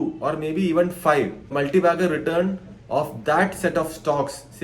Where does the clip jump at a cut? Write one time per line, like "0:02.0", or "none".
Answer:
0:01.4